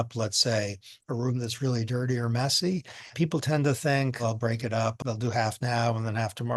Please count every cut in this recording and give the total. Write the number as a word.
one